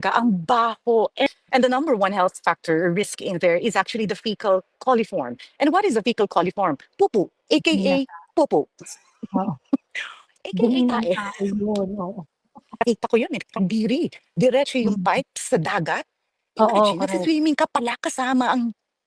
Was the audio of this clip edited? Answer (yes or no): yes